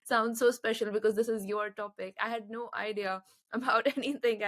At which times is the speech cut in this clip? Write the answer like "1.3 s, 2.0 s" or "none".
none